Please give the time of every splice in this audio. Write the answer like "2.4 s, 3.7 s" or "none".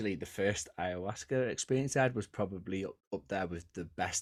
none